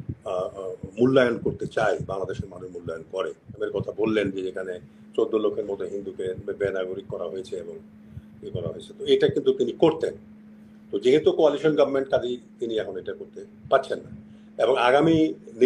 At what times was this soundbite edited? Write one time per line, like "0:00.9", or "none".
0:03.6